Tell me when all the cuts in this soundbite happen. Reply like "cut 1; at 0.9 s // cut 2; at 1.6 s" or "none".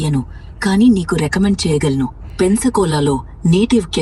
none